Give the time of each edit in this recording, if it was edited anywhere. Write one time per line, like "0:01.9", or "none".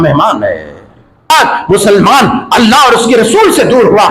0:01.3